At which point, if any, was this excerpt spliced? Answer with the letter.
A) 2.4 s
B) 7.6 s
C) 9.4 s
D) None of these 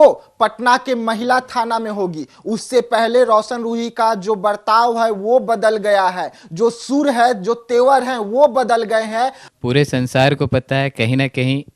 C